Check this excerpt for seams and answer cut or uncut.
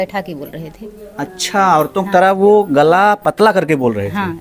uncut